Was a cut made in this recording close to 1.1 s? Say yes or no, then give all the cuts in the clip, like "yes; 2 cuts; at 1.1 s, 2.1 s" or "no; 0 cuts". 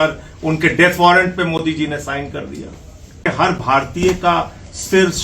no; 1 cut; at 3.2 s